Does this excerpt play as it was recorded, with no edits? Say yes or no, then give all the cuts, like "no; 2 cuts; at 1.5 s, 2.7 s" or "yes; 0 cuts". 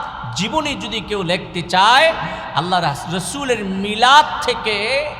yes; 0 cuts